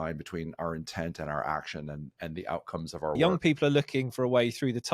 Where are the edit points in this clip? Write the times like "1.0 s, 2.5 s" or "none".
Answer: 3.2 s